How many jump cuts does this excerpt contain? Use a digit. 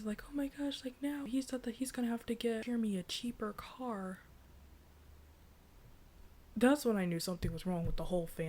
2